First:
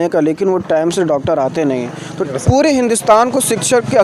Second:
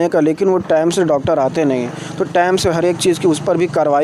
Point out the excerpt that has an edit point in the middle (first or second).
first